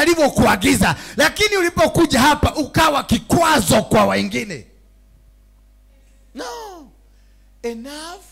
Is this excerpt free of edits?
no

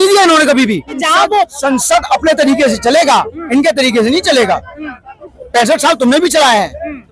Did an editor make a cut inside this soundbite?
yes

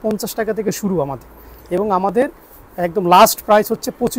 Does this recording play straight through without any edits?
yes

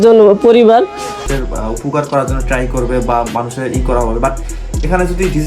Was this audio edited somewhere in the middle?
yes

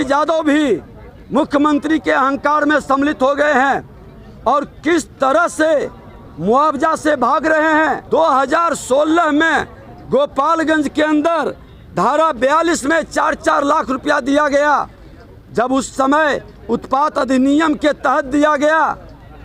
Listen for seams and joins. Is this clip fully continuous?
no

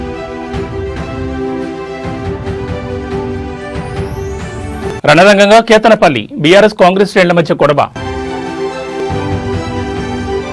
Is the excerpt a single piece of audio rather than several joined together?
yes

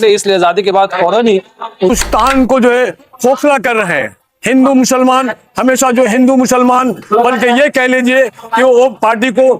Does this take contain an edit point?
yes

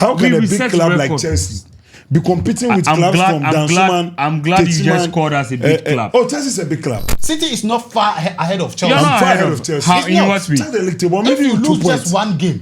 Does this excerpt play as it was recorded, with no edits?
no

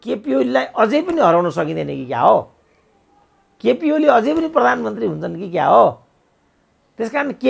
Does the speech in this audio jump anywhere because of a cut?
no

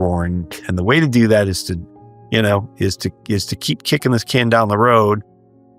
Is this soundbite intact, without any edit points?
yes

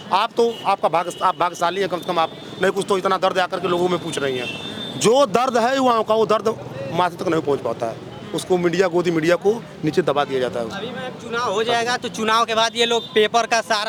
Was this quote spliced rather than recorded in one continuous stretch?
no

